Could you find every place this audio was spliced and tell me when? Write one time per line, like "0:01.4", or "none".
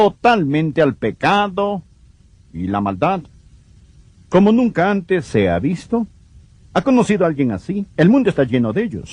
0:04.7